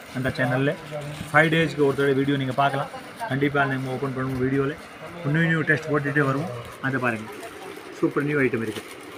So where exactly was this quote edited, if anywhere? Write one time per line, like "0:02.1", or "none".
none